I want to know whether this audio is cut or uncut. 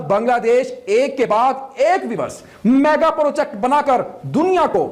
uncut